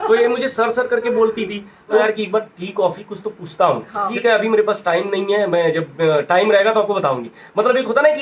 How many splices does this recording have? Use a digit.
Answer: 2